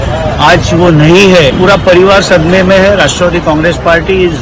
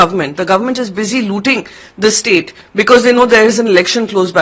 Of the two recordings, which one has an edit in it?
first; 1 cut; at 1.5 s

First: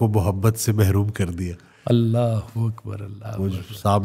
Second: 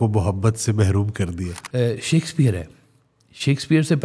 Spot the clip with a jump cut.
second; 1 cut; at 1.6 s

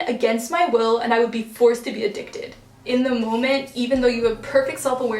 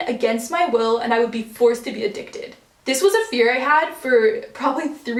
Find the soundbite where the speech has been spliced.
first; 1 cut; at 2.8 s

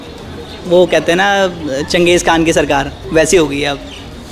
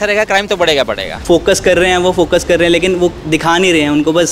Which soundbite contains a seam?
second; 1 cut; at 1.1 s

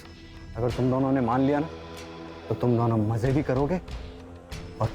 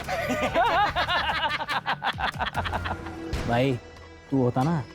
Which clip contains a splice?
second; 1 cut; at 3.1 s

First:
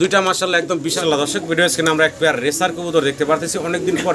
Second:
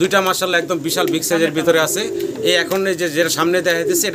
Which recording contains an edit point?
first; 1 cut; at 1.0 s

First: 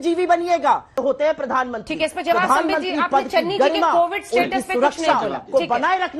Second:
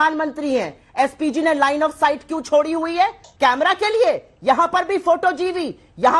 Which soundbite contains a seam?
first; 1 cut; at 1.0 s

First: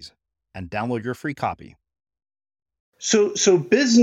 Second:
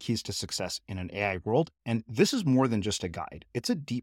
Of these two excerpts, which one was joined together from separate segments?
first; 1 cut; at 3.0 s

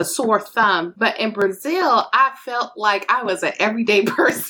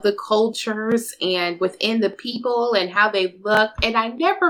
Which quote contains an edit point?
first; 1 cut; at 0.9 s

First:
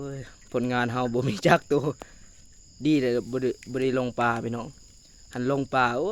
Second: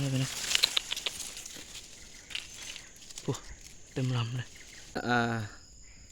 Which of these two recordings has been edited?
second; 1 cut; at 5.0 s

